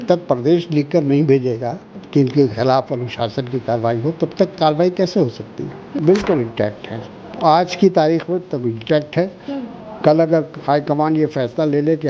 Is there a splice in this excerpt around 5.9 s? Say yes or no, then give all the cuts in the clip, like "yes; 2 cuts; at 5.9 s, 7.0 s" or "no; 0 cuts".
yes; 2 cuts; at 1.9 s, 5.9 s